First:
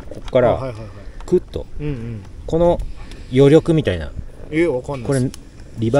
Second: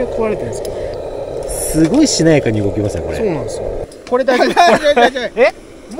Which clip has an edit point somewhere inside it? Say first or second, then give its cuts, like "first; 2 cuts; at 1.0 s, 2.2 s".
second; 2 cuts; at 0.9 s, 3.8 s